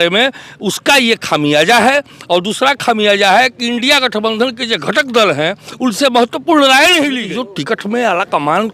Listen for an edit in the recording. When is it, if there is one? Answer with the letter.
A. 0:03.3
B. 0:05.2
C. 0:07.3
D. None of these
C